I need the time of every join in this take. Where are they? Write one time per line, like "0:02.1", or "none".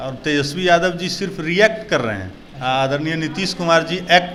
none